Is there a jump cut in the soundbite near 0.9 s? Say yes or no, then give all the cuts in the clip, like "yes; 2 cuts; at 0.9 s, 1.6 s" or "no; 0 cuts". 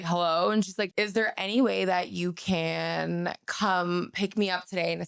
yes; 1 cut; at 0.9 s